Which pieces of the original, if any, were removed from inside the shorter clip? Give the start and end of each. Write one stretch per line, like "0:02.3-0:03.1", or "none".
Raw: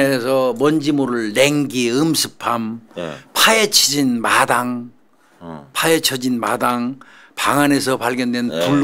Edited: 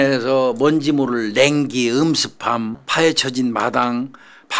0:02.8-0:05.7